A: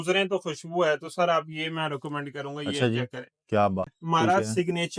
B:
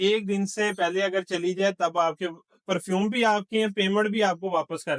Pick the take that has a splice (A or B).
A